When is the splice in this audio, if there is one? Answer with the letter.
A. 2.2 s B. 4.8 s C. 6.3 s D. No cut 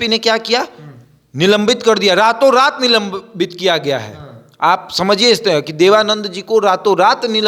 D